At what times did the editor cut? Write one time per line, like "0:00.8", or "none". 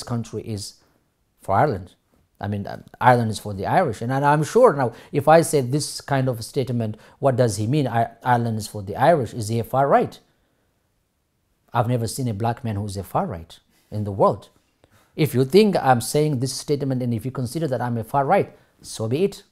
none

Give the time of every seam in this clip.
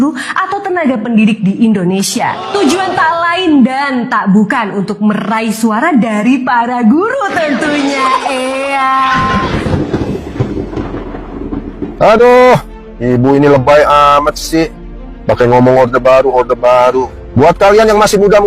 0:09.3

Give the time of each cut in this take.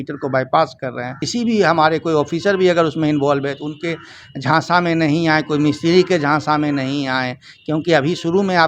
0:01.2

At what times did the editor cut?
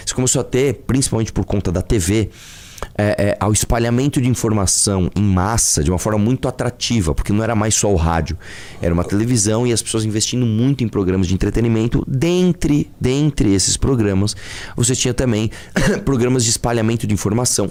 none

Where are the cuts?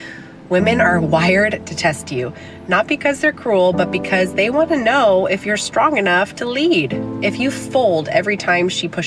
0:02.5
0:07.1

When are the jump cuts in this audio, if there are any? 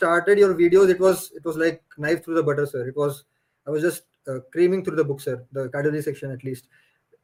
none

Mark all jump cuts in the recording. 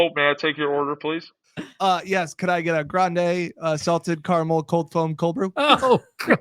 0:01.3

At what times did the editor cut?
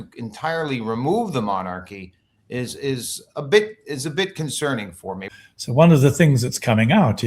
0:05.2

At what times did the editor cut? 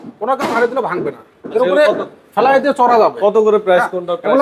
none

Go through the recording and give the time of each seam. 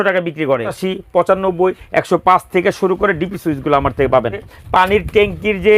0:00.8
0:04.5

